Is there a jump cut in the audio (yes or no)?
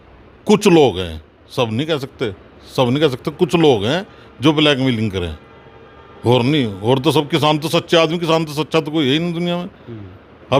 no